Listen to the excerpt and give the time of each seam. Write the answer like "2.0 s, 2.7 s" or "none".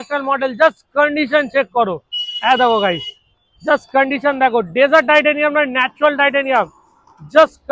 none